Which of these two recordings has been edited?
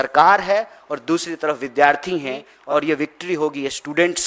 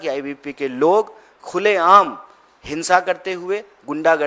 first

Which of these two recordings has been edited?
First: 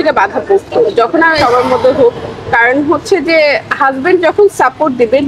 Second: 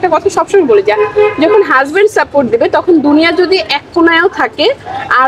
first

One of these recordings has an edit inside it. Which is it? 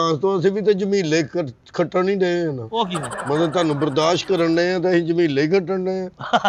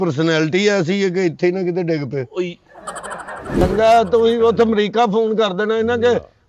second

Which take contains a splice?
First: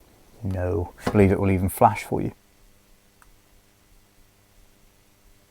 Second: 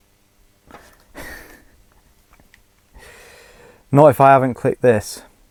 first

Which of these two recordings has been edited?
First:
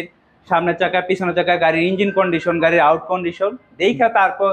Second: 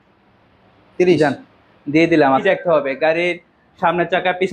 second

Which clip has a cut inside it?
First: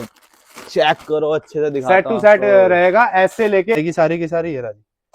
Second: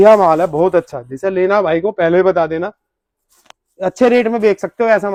first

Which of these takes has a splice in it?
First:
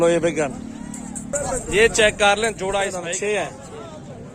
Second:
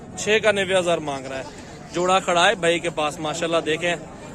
first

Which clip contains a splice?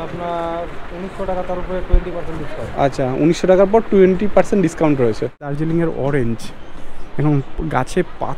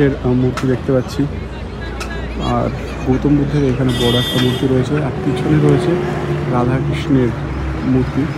first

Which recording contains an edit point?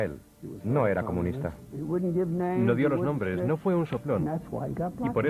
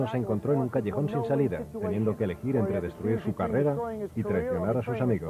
first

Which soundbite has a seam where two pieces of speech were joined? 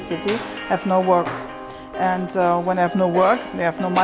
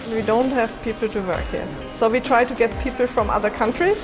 second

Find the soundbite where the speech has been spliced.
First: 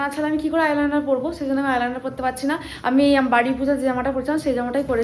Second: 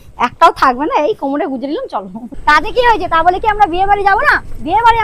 second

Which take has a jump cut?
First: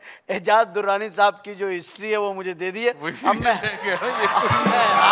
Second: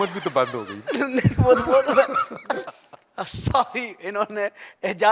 second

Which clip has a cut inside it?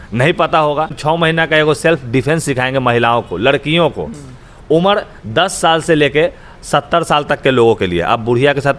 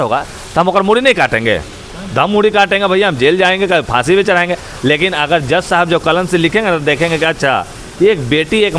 first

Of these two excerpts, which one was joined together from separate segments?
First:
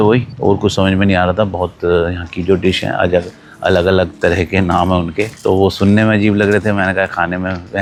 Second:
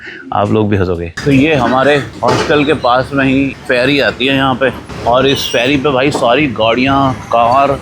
second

